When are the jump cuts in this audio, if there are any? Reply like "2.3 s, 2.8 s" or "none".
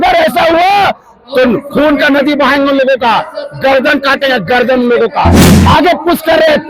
5.5 s